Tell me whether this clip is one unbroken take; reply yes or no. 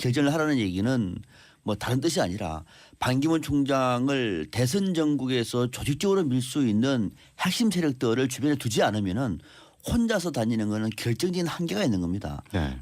no